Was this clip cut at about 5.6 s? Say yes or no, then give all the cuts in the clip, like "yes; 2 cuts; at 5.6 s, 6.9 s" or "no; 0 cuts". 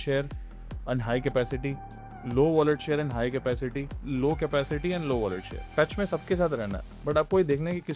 yes; 2 cuts; at 4.0 s, 5.6 s